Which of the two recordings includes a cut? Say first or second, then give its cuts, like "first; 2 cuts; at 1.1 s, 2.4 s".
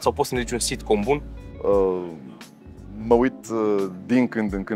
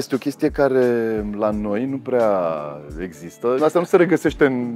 second; 1 cut; at 3.6 s